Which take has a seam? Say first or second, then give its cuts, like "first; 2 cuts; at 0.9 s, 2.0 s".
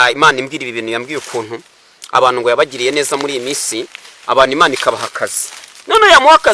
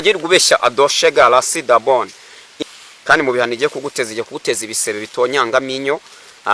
second; 1 cut; at 2.6 s